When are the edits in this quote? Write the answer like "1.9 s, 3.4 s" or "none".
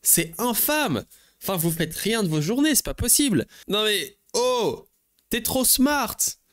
3.6 s